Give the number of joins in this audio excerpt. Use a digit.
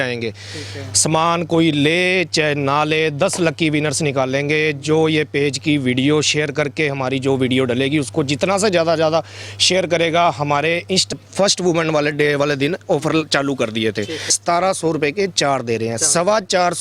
2